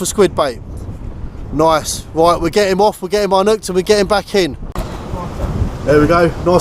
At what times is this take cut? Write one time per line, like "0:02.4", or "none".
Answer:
0:04.7